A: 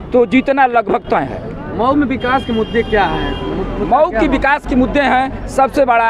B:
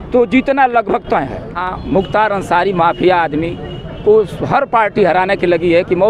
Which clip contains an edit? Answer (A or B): B